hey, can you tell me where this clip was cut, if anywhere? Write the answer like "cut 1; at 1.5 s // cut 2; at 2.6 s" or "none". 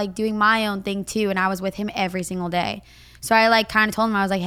none